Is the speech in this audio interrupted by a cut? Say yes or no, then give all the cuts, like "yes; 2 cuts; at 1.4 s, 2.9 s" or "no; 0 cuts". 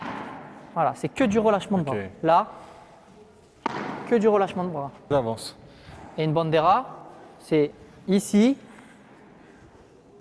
yes; 1 cut; at 5.1 s